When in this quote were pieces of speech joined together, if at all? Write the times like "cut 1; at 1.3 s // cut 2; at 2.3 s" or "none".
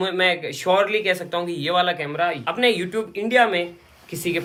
none